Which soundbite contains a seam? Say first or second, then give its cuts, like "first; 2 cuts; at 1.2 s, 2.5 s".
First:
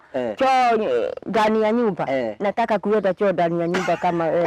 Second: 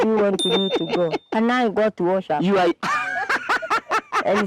second; 1 cut; at 1.3 s